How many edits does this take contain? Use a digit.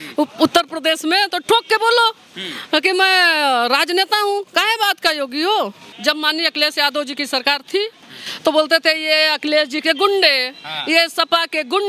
1